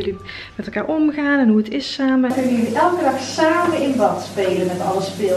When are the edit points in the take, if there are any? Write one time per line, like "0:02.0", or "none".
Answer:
0:02.3